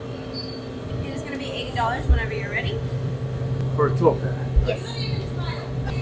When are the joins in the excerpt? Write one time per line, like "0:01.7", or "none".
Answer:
none